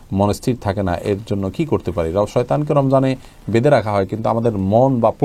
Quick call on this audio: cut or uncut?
uncut